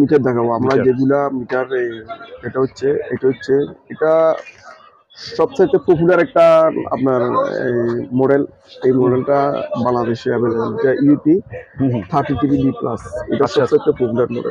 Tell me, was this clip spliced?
no; 0 cuts

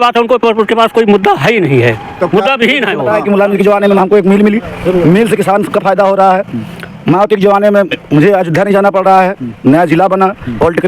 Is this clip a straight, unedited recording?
no; 1 cut; at 3.0 s

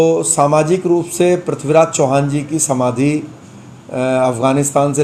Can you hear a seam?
no; 0 cuts

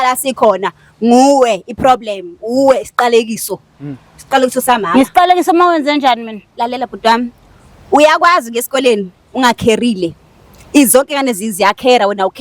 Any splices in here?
no; 0 cuts

